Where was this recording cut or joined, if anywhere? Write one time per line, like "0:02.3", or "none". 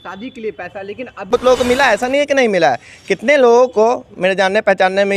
0:01.3